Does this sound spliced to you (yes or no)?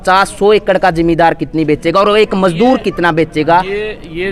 no